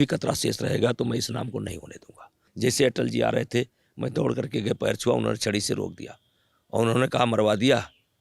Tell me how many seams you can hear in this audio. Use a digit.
1